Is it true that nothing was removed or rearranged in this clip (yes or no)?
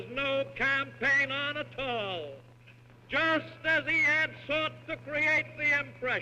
no